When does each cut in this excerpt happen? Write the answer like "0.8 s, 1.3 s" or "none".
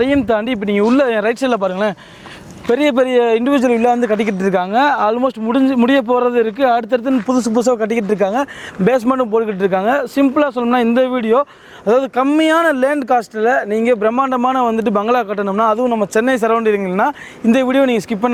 none